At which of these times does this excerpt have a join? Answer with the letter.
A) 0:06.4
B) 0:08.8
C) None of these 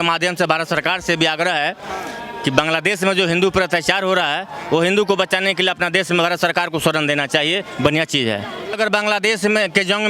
B